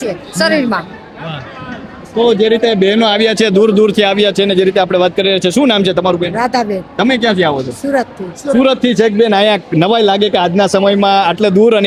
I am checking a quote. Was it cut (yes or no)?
no